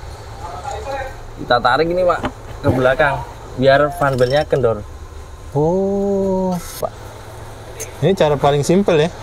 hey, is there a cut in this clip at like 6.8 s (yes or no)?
yes